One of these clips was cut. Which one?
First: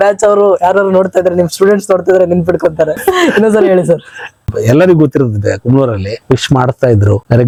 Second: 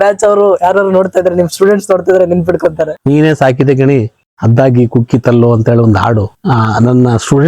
second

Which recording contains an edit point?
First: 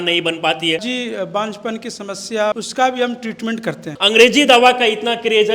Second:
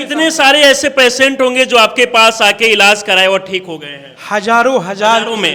first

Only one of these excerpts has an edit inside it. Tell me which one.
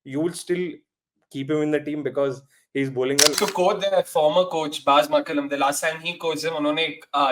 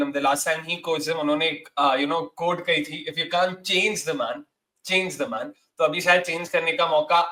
first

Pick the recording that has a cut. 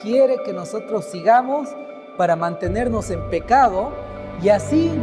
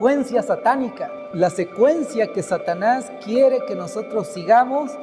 second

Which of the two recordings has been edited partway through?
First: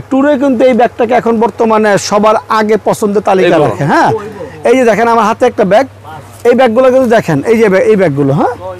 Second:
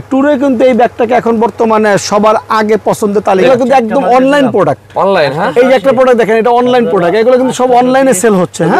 second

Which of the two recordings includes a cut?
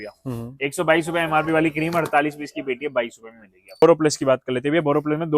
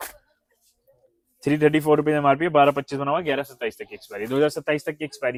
first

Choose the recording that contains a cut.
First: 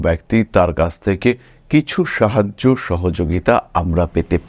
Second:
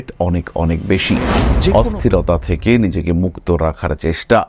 second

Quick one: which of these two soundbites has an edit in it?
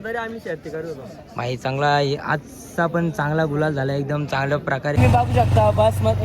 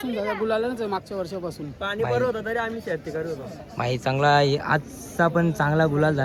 first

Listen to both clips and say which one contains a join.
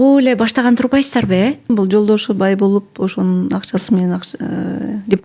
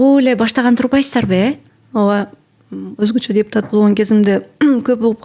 first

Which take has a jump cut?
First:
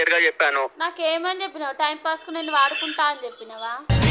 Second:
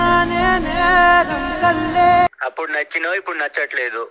second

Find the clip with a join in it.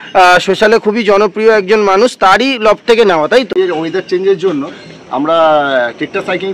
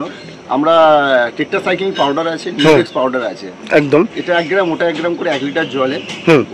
first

